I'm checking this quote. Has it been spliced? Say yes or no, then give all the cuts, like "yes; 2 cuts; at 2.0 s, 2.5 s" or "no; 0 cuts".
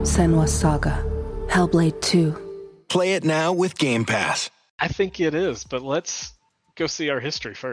yes; 1 cut; at 4.7 s